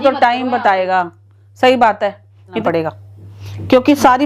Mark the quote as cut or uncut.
cut